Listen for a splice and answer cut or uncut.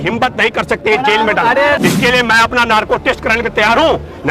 cut